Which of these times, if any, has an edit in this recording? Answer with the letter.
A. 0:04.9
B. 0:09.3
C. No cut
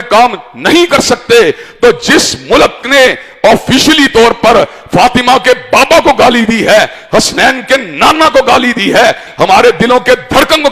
B